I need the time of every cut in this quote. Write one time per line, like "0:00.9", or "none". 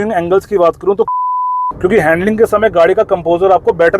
0:01.1